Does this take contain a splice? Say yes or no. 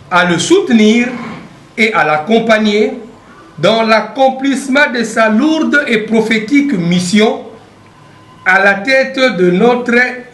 no